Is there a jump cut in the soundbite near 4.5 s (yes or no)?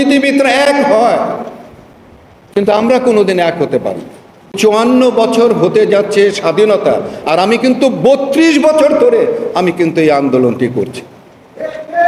yes